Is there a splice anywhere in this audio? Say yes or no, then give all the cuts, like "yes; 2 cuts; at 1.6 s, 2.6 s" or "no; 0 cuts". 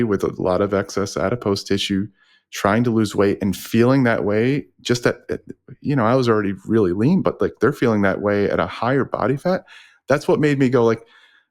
no; 0 cuts